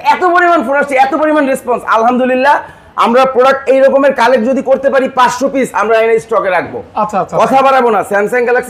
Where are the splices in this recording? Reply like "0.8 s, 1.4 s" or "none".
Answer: none